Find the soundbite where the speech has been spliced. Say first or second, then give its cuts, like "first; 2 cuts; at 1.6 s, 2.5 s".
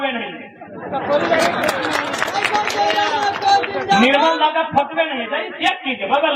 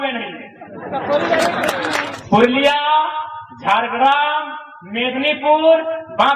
second; 1 cut; at 2.1 s